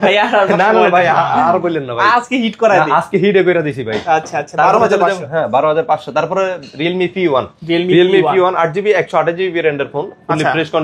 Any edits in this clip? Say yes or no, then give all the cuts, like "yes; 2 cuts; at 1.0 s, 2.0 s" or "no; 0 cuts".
no; 0 cuts